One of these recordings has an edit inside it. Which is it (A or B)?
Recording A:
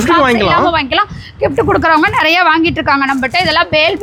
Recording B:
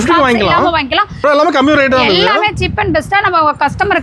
B